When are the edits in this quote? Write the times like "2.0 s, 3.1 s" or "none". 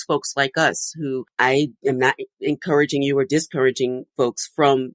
1.8 s